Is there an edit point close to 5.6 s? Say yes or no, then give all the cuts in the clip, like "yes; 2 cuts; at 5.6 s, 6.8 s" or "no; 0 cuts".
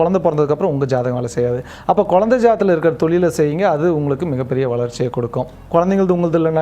yes; 1 cut; at 5.6 s